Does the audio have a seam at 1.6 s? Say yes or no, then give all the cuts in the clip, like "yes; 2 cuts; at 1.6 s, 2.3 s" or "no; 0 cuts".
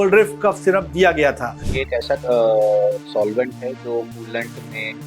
yes; 1 cut; at 1.6 s